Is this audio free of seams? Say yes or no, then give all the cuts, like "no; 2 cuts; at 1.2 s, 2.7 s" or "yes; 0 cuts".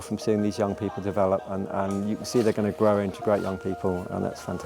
yes; 0 cuts